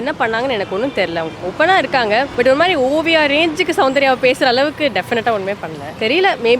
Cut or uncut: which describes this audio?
uncut